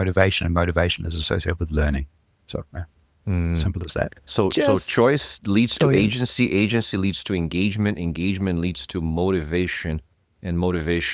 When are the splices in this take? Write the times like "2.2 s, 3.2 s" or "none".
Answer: none